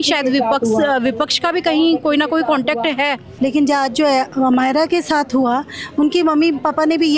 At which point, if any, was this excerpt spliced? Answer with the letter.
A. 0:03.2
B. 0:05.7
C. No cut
A